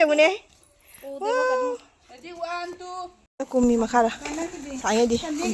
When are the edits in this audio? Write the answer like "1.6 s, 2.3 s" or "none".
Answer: 3.2 s